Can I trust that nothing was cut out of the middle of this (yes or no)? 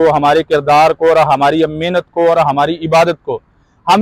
yes